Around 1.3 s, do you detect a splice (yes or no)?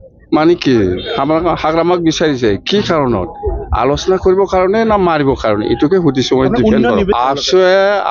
no